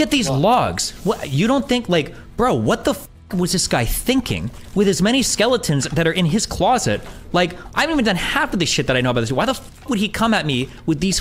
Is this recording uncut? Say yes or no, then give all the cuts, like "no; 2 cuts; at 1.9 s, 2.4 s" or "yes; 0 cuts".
yes; 0 cuts